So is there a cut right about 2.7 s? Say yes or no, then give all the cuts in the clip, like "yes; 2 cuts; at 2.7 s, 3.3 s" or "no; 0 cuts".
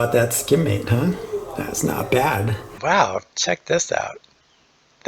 yes; 1 cut; at 2.7 s